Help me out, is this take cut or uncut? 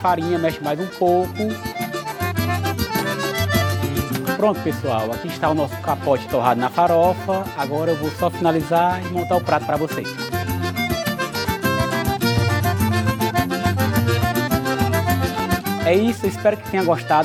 uncut